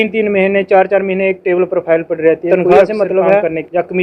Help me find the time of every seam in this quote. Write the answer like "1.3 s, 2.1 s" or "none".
2.6 s